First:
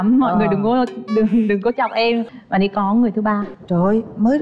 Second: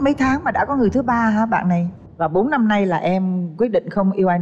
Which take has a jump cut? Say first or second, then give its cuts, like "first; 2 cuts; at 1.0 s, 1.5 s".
first; 1 cut; at 2.3 s